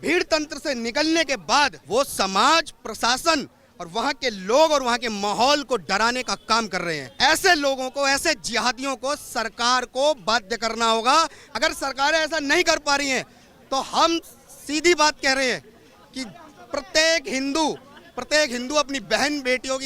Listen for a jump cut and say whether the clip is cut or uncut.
cut